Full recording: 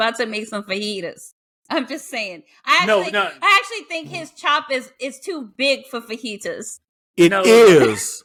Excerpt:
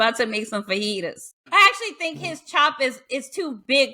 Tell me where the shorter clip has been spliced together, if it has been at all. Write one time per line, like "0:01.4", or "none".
0:01.4